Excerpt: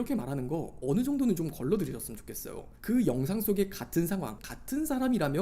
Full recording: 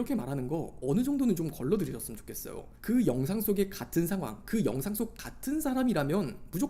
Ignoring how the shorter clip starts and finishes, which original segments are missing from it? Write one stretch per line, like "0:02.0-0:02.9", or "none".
0:04.4-0:05.2